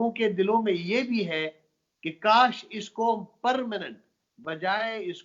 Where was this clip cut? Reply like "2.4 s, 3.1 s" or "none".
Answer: none